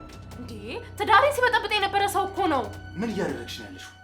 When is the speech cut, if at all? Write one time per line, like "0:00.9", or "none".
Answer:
0:02.8